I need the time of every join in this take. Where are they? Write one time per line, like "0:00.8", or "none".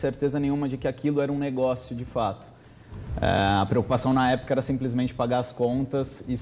none